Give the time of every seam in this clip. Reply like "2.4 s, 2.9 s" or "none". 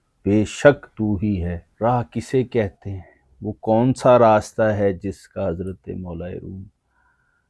1.6 s